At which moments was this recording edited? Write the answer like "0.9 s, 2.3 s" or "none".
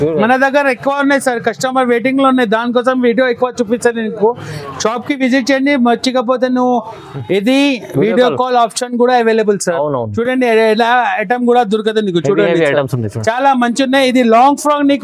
none